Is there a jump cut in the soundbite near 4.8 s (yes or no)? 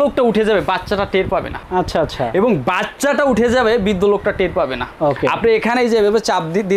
yes